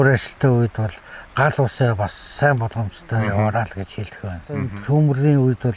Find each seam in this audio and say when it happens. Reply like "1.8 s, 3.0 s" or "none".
4.6 s